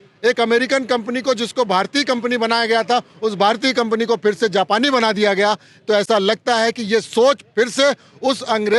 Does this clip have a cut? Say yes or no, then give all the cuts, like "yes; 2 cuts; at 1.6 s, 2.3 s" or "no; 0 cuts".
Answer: no; 0 cuts